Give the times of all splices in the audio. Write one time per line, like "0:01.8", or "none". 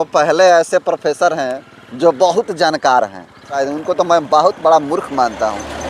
0:03.6